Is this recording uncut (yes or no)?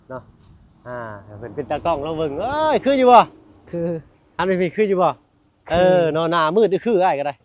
yes